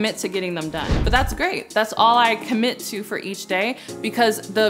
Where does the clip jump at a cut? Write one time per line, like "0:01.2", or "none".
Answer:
0:00.9